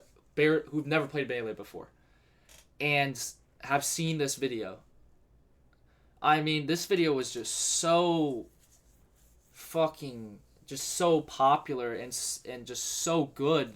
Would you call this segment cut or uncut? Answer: uncut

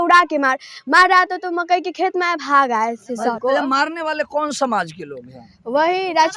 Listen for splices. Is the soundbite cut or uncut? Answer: cut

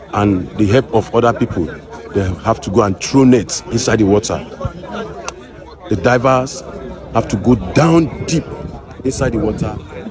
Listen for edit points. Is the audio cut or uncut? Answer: uncut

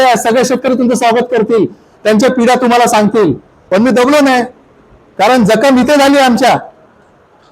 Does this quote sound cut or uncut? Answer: cut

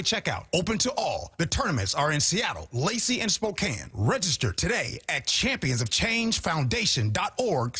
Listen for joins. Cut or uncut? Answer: uncut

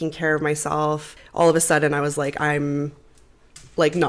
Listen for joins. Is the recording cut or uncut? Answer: cut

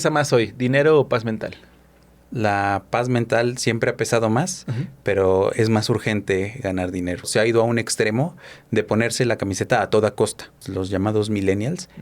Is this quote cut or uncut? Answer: cut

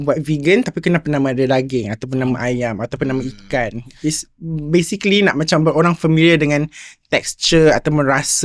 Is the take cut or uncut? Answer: uncut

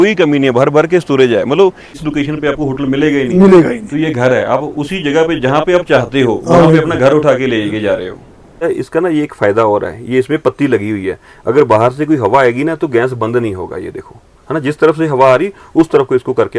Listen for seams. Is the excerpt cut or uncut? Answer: cut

